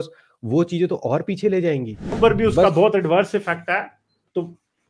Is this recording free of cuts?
no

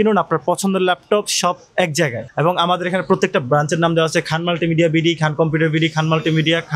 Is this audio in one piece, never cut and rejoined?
yes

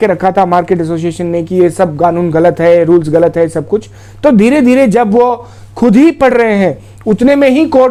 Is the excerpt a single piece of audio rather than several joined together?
yes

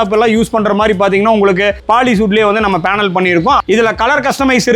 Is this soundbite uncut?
no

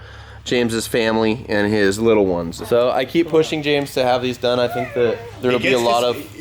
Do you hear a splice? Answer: yes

